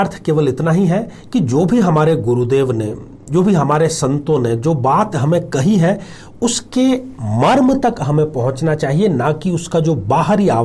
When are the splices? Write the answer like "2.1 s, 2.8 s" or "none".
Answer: none